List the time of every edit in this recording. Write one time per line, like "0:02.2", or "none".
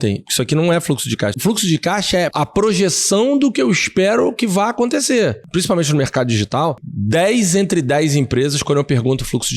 0:01.4
0:02.3
0:05.4
0:06.9